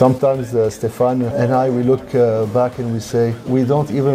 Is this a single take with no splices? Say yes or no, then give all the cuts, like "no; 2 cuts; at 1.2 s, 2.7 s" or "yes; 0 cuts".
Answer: yes; 0 cuts